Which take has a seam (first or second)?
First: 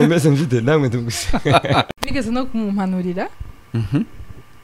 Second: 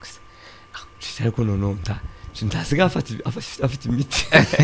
first